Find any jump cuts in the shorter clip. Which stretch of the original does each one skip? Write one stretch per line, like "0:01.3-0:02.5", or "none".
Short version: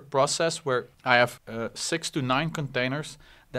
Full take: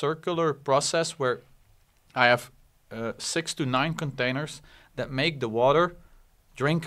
0:01.5-0:02.0
0:02.5-0:02.9